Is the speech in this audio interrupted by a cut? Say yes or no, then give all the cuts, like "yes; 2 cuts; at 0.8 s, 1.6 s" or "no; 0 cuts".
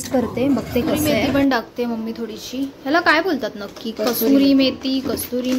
yes; 1 cut; at 1.1 s